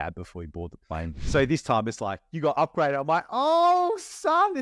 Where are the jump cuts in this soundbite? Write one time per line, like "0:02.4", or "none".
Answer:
0:01.2